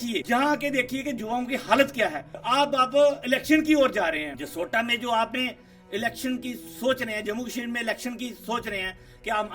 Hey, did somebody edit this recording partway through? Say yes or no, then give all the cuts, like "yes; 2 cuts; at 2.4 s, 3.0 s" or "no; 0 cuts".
no; 0 cuts